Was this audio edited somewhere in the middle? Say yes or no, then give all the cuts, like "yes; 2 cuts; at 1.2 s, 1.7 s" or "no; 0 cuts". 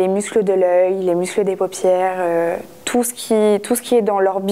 no; 0 cuts